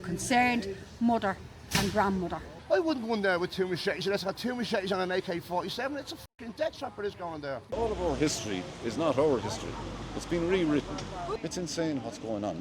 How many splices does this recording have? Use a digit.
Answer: 3